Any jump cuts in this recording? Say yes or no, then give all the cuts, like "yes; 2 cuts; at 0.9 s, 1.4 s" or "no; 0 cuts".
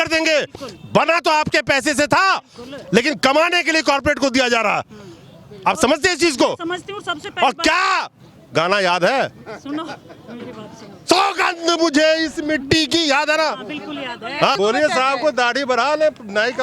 yes; 1 cut; at 14.5 s